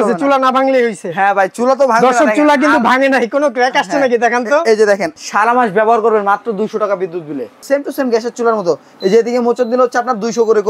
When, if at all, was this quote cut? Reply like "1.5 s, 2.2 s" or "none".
5.2 s, 7.7 s